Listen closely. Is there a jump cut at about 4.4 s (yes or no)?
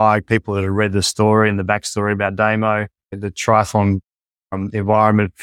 no